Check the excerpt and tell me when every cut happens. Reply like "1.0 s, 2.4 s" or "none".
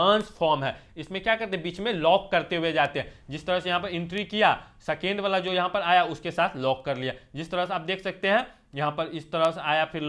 none